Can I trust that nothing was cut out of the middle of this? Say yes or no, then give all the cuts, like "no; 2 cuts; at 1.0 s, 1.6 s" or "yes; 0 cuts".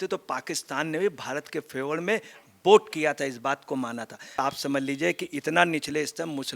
no; 1 cut; at 4.4 s